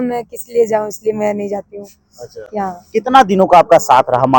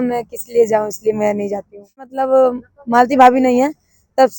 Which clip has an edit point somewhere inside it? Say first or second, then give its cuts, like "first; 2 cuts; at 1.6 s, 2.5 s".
second; 1 cut; at 2.2 s